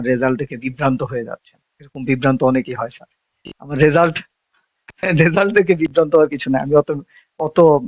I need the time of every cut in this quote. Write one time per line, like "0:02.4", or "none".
none